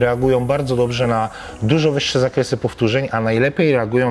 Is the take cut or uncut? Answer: uncut